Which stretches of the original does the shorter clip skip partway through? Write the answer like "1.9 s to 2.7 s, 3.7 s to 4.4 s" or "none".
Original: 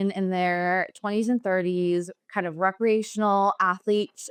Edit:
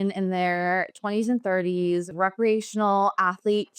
2.1 s to 2.5 s